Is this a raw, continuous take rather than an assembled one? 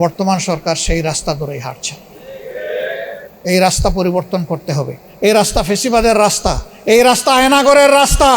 no; 3 cuts; at 3.3 s, 5.0 s, 6.7 s

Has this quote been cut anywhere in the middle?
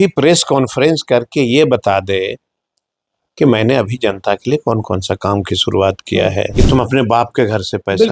yes; 1 cut; at 6.5 s

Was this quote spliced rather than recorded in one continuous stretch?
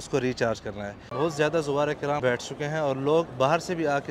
yes; 3 cuts; at 1.1 s, 2.2 s, 3.3 s

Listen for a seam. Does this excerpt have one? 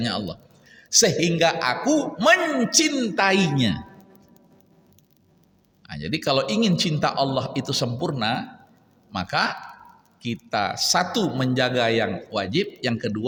no; 0 cuts

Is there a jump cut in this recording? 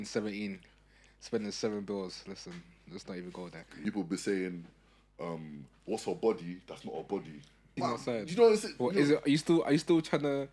yes; 2 cuts; at 3.6 s, 7.7 s

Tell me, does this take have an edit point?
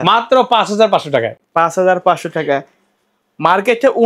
no; 0 cuts

